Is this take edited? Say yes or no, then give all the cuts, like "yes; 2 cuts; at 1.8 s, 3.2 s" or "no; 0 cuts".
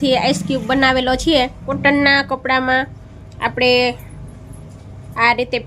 yes; 1 cut; at 1.7 s